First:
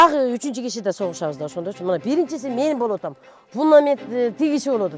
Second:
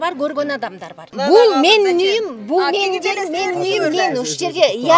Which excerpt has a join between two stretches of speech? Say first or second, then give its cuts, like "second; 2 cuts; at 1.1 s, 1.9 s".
second; 1 cut; at 1.1 s